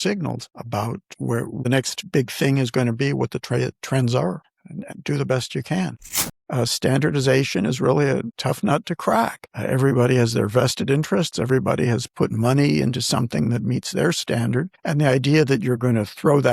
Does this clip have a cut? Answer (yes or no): yes